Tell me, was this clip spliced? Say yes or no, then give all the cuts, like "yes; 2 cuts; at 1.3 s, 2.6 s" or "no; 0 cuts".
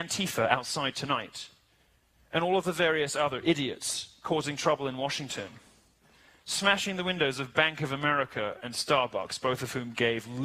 yes; 1 cut; at 5.7 s